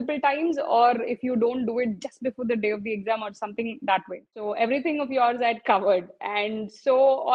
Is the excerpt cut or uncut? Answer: cut